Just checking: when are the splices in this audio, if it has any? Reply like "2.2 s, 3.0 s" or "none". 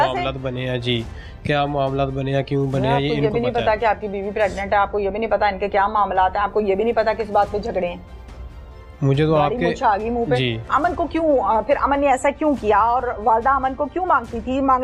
none